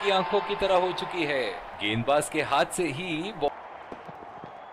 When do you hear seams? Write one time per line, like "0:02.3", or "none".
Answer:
0:03.5